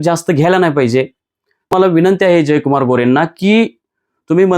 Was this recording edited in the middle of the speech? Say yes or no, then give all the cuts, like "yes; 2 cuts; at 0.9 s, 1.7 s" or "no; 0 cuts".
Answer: yes; 1 cut; at 1.7 s